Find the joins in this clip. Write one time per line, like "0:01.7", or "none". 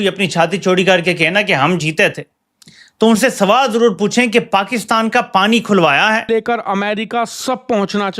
0:06.3